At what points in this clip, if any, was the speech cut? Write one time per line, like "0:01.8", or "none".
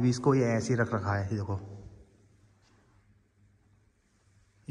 none